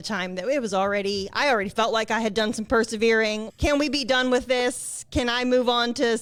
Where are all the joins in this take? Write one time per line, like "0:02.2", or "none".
none